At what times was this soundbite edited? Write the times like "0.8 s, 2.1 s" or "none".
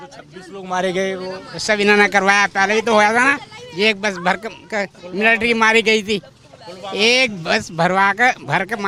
none